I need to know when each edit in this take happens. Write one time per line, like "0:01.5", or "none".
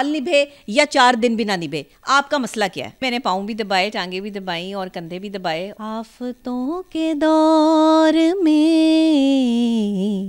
0:03.0
0:05.7